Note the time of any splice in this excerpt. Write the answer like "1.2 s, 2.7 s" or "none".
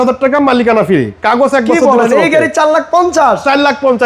none